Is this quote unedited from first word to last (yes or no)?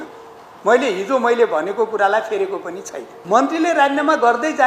no